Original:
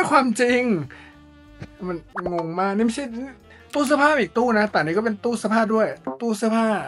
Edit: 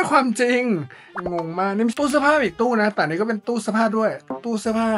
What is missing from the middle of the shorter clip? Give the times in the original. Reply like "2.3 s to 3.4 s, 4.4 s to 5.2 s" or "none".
1.1 s to 2.1 s, 2.9 s to 3.7 s